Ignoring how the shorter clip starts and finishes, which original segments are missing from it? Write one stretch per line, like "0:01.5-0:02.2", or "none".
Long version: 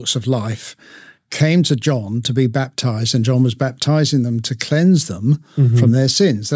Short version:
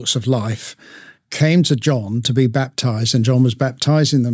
none